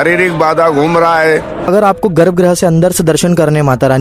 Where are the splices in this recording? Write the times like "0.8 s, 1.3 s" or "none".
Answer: 1.7 s